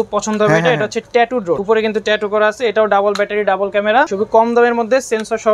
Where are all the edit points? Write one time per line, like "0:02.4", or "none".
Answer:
0:01.6
0:04.1